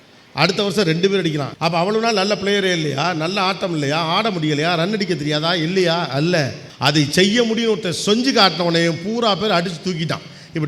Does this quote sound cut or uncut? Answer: cut